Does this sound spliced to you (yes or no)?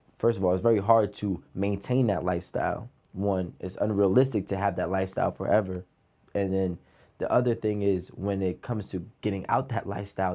no